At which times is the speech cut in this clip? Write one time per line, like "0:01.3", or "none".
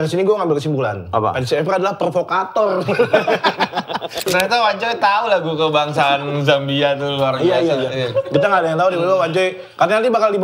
0:04.2

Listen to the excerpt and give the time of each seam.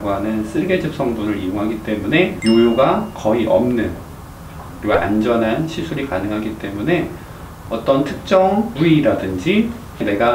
none

